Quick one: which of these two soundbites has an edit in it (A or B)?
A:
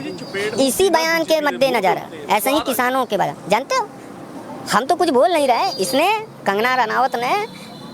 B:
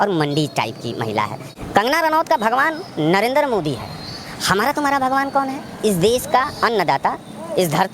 B